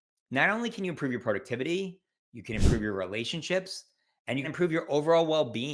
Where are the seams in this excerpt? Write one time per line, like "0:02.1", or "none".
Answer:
0:04.5